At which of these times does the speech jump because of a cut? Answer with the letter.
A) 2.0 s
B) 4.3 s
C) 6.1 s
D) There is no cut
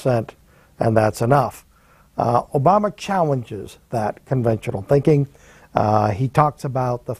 B